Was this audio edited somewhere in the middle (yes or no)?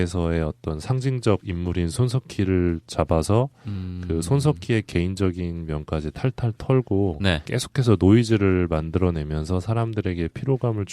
no